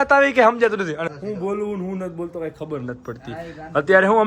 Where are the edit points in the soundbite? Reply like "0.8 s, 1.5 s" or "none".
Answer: 1.0 s